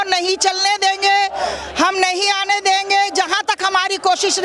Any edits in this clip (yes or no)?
no